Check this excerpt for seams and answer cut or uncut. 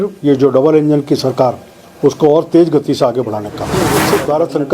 cut